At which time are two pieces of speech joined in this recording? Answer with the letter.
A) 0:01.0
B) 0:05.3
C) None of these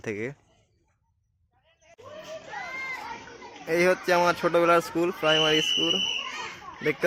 C